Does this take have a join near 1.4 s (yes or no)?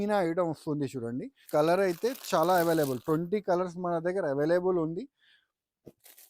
yes